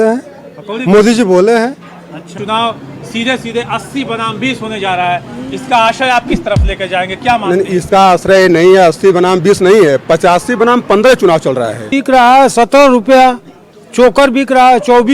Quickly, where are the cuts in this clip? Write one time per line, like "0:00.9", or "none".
0:02.4
0:11.9